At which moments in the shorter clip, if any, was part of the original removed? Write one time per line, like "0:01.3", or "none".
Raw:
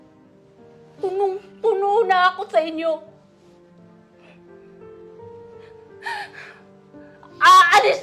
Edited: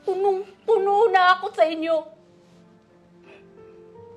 0:02.2